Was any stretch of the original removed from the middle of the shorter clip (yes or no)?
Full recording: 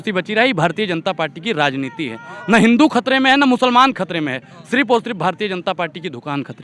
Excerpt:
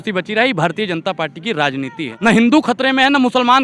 yes